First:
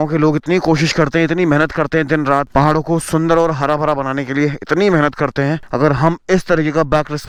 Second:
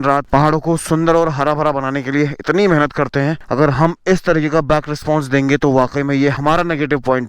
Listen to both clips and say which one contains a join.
second; 1 cut; at 6.4 s

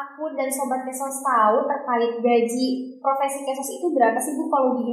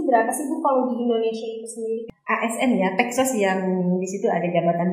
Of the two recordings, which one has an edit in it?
second; 1 cut; at 2.0 s

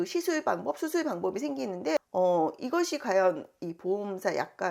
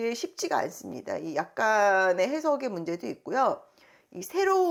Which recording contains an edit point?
first; 1 cut; at 2.0 s

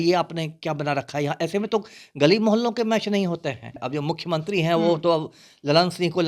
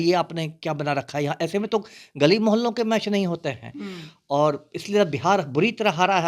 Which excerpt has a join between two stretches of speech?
first; 1 cut; at 3.7 s

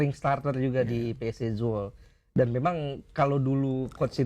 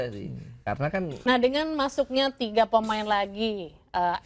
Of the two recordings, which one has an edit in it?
second; 1 cut; at 1.1 s

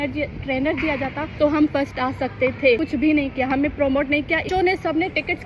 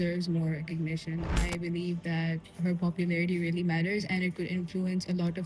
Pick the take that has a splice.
first; 3 cuts; at 1.2 s, 2.8 s, 4.4 s

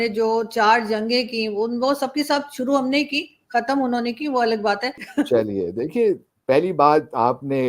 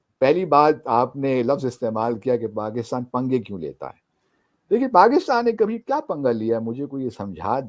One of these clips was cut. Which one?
first; 1 cut; at 5.0 s

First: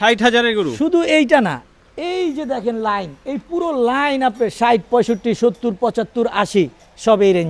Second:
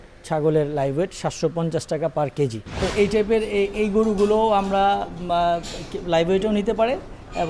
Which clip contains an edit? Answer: second; 1 cut; at 2.7 s

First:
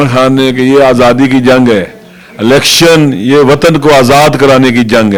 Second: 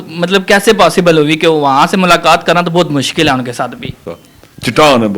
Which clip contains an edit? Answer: second; 1 cut; at 4.1 s

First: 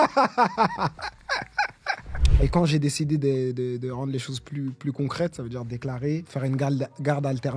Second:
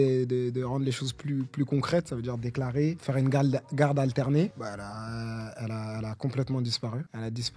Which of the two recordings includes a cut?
first; 1 cut; at 2.2 s

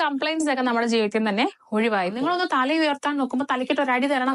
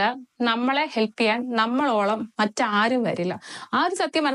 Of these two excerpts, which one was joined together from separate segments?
first; 1 cut; at 2.2 s

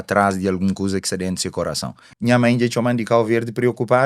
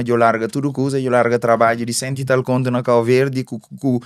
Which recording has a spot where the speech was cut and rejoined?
first; 1 cut; at 2.0 s

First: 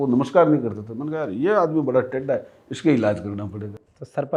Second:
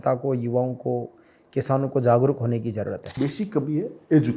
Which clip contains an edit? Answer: second; 1 cut; at 3.1 s

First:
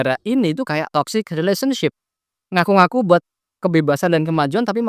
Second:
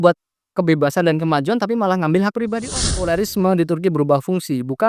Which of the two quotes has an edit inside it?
second; 1 cut; at 2.8 s

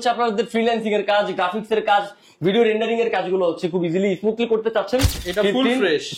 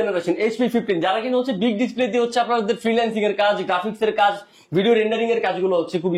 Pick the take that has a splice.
first; 1 cut; at 5.2 s

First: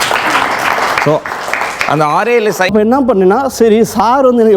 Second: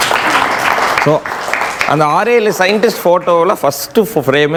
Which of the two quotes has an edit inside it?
first; 1 cut; at 2.7 s

